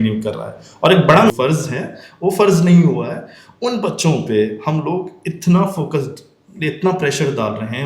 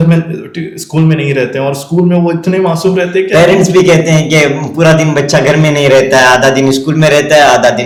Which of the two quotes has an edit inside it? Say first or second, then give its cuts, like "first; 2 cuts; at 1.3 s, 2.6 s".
first; 1 cut; at 1.3 s